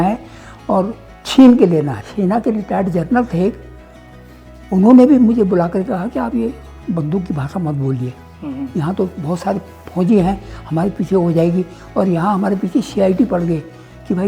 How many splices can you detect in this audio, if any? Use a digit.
1